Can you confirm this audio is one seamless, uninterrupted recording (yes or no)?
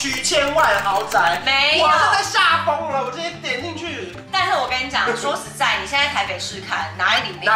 yes